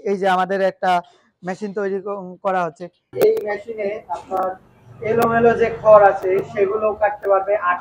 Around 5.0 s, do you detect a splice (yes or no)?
no